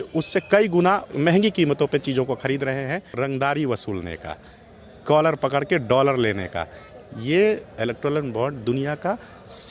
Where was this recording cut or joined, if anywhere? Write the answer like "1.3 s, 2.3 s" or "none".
1.1 s, 3.0 s